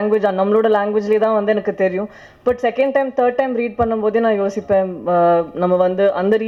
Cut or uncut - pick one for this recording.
uncut